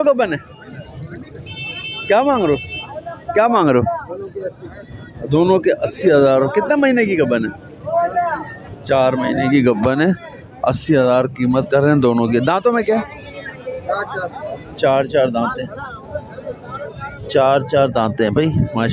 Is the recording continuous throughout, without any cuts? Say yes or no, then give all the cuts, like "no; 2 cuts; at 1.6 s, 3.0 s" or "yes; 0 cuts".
yes; 0 cuts